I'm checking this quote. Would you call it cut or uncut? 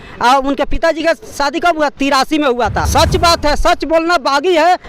cut